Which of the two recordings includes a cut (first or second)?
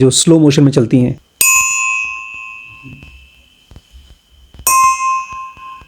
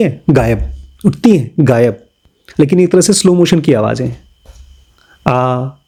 first